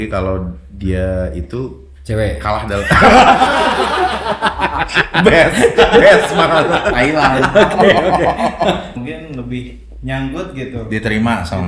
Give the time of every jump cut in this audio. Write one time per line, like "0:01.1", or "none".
0:08.9